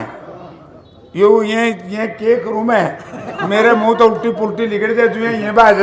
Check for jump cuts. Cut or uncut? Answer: uncut